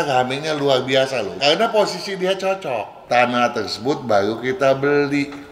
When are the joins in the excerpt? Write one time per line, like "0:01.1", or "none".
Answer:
0:01.4
0:02.9